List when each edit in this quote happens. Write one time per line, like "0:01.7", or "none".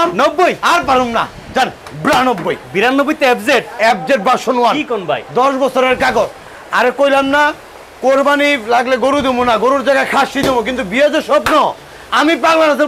none